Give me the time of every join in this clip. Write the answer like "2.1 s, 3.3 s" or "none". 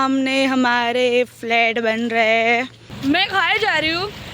2.8 s